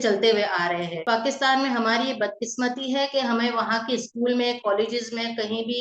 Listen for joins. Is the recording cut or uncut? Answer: cut